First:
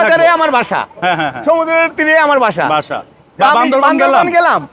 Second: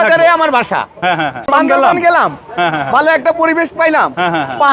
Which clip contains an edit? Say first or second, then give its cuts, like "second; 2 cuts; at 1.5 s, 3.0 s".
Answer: second; 1 cut; at 1.5 s